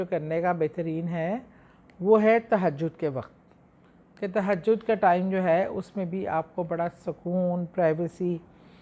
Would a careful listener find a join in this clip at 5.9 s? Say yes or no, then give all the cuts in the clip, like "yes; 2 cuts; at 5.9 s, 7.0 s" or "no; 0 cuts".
no; 0 cuts